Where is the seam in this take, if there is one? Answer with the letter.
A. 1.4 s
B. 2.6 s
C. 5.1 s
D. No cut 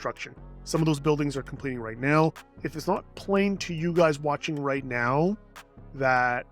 B